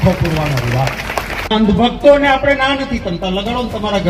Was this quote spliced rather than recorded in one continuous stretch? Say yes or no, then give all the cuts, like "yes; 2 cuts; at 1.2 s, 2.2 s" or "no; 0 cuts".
no; 0 cuts